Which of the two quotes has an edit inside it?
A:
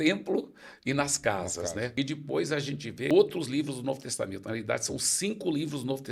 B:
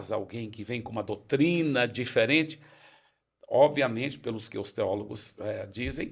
A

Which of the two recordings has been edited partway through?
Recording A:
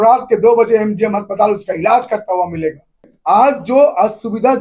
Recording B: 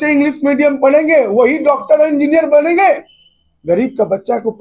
A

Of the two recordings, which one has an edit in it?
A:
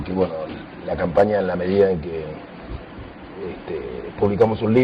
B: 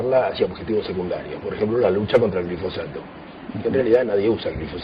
A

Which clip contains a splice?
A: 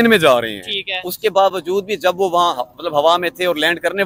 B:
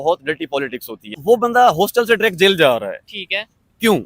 B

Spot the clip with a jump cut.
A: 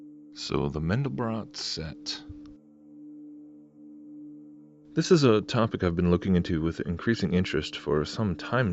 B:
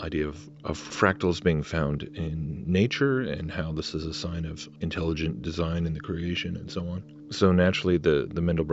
A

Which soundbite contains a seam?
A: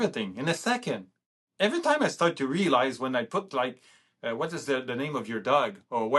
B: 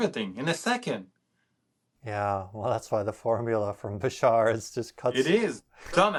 A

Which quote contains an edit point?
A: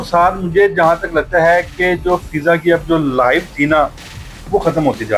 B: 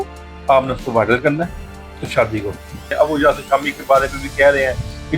B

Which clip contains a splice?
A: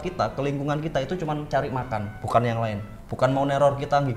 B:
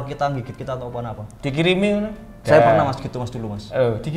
B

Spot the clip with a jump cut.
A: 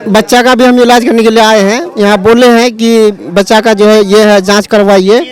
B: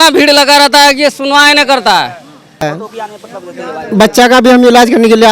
B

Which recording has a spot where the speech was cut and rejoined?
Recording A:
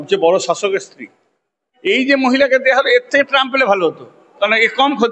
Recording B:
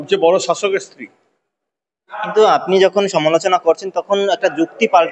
A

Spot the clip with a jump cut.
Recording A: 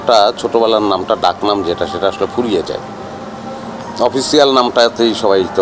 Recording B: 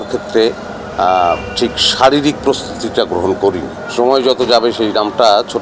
B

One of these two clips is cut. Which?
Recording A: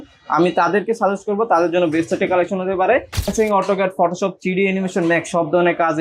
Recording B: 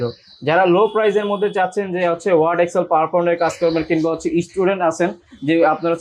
A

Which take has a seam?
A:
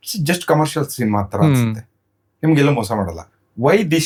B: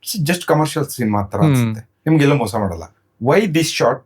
B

